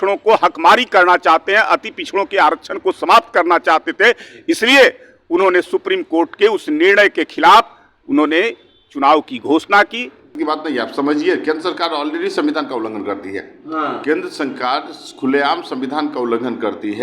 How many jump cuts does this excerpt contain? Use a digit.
1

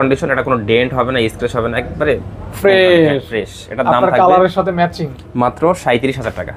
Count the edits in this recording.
0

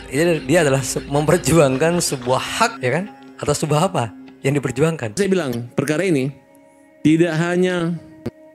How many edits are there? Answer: 1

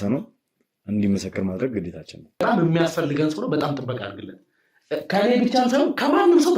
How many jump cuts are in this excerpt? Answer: 1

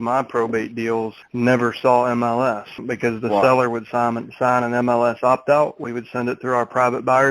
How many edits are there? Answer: 2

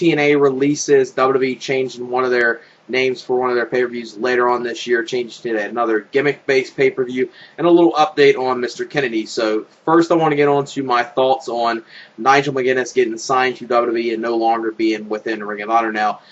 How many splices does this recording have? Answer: 1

